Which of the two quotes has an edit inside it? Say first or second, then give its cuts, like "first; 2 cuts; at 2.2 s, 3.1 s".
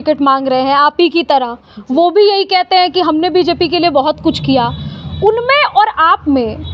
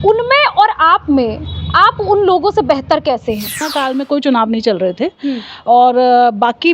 second; 1 cut; at 3.7 s